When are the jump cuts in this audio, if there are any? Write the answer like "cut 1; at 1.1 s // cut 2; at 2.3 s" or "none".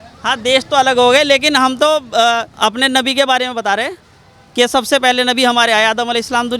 cut 1; at 2.5 s